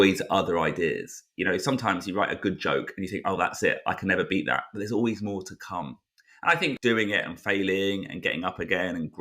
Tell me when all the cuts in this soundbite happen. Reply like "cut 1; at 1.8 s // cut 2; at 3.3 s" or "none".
cut 1; at 6.8 s

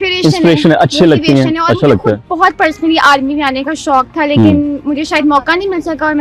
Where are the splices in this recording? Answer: none

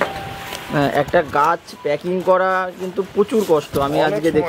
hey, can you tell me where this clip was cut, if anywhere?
none

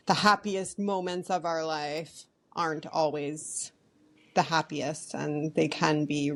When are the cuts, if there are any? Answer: none

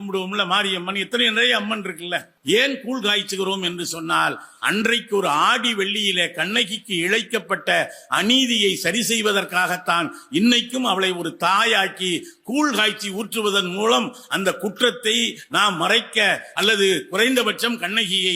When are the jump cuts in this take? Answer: cut 1; at 2.3 s

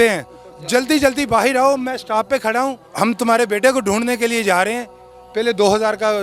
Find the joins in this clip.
cut 1; at 2.8 s

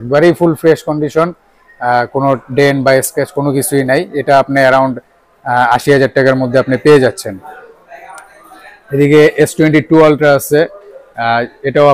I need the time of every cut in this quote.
none

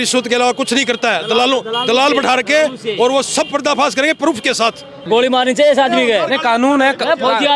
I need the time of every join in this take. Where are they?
cut 1; at 5.1 s

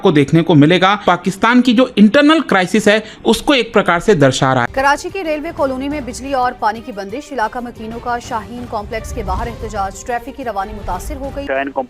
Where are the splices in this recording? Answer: cut 1; at 1.0 s // cut 2; at 4.7 s

